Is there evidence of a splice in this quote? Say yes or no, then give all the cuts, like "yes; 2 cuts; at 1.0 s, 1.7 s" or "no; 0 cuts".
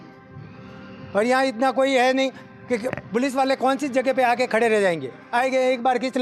no; 0 cuts